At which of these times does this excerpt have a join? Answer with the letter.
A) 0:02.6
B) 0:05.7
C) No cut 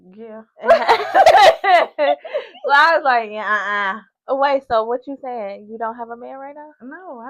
C